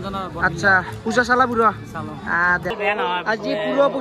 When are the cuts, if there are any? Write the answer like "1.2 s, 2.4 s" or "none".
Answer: 2.7 s